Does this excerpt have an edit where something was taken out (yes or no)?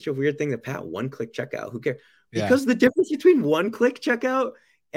no